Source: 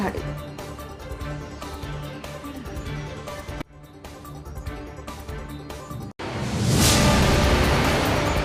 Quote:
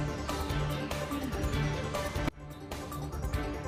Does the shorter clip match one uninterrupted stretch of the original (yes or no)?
yes